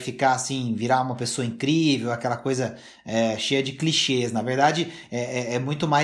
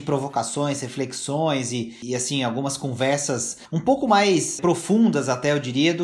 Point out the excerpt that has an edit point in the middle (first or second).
second